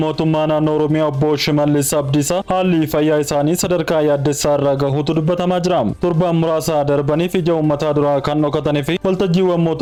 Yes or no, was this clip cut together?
no